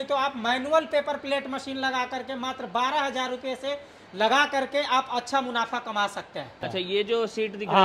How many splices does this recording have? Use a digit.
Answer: 1